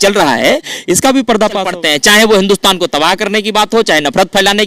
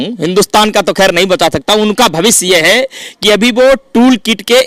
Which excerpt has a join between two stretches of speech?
first; 1 cut; at 1.7 s

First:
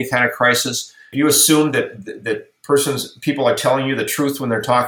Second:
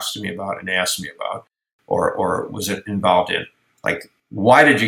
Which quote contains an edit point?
first; 1 cut; at 1.1 s

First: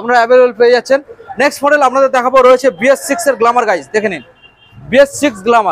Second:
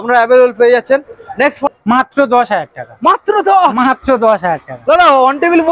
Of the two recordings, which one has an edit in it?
second; 1 cut; at 1.6 s

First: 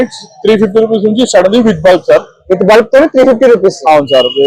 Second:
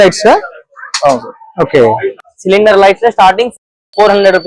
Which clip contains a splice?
second; 1 cut; at 2.3 s

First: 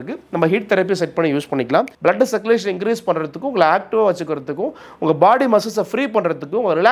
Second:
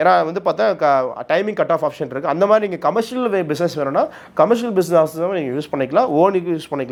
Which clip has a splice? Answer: first; 1 cut; at 1.9 s

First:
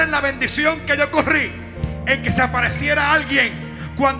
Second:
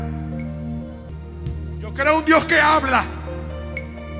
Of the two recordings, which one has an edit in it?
second; 1 cut; at 1.1 s

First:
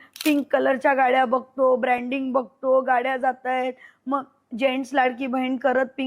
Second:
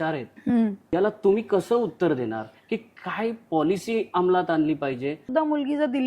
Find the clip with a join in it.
second; 2 cuts; at 0.9 s, 5.2 s

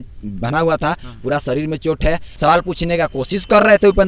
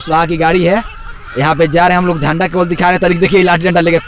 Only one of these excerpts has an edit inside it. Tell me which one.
first; 1 cut; at 2.3 s

